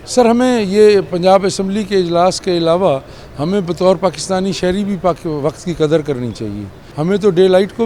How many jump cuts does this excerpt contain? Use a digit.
1